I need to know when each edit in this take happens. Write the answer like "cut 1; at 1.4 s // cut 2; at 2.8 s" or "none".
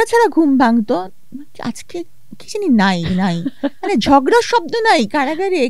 none